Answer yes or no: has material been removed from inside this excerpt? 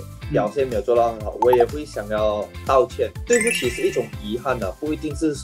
no